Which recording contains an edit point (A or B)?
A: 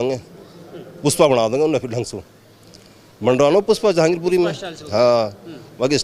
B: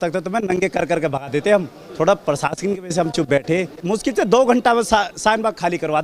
B